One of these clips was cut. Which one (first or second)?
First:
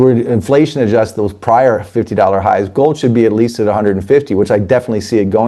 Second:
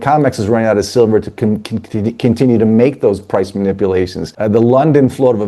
second